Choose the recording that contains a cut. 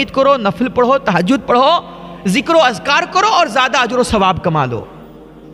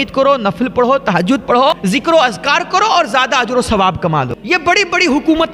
second; 2 cuts; at 1.7 s, 4.4 s

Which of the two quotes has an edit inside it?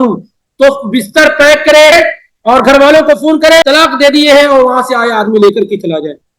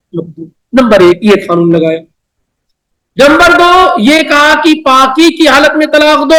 first; 2 cuts; at 1.9 s, 3.6 s

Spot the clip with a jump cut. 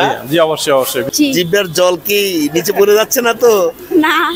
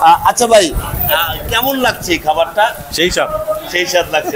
first; 1 cut; at 1.1 s

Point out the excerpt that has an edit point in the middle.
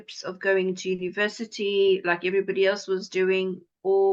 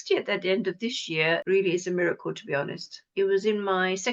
second; 2 cuts; at 1.4 s, 3.0 s

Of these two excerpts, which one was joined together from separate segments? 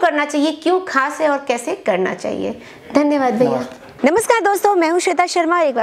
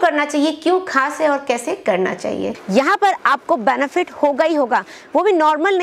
second; 1 cut; at 2.5 s

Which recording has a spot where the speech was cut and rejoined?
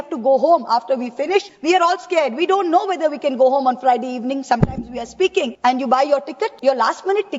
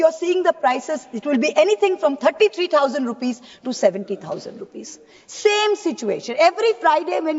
first; 3 cuts; at 1.5 s, 5.5 s, 6.6 s

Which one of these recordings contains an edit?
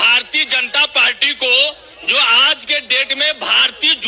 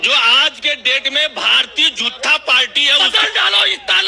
second; 1 cut; at 3.0 s

